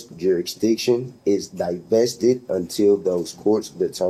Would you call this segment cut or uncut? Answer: uncut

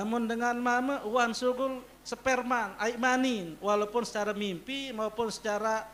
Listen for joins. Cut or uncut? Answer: uncut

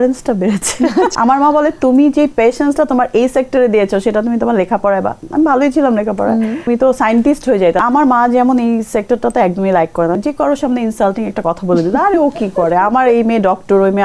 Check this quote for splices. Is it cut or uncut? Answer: cut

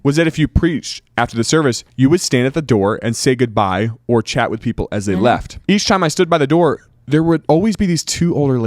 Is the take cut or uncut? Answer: cut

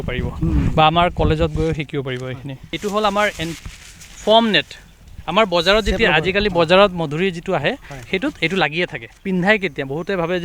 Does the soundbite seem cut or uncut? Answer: cut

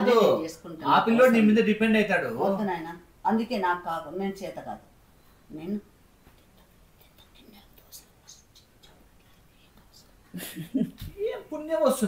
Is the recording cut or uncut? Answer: uncut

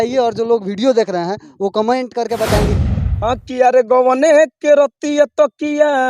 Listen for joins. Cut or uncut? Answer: cut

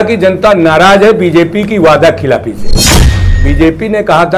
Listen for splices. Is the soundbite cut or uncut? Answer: uncut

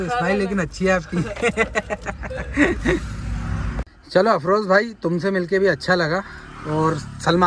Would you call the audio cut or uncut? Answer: uncut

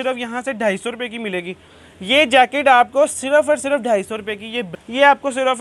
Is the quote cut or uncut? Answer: cut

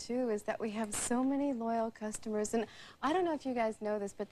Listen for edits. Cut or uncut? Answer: cut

